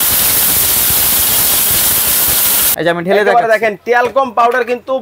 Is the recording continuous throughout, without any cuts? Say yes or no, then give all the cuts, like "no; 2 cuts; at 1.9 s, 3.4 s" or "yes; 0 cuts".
no; 1 cut; at 2.6 s